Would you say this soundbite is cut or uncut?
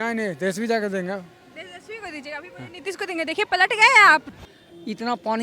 cut